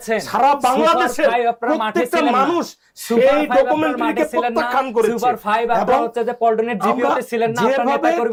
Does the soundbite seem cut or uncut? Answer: uncut